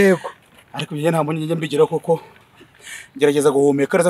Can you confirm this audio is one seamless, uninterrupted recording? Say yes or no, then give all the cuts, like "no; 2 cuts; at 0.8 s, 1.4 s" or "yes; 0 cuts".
yes; 0 cuts